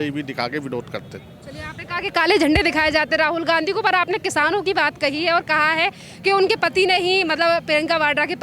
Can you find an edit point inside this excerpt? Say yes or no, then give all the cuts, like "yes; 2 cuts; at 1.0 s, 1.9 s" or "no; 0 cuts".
no; 0 cuts